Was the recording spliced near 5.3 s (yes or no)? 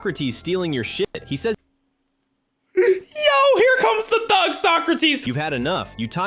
yes